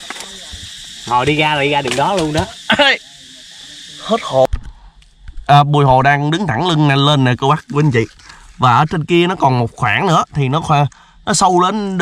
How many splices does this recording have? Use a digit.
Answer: 1